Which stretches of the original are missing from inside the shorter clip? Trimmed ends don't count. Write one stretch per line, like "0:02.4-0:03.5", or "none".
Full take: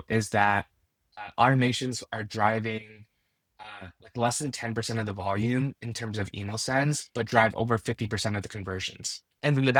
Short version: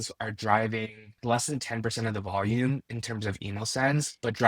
0:03.0-0:04.0